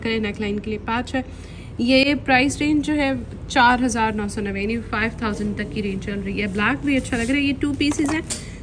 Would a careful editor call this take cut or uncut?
uncut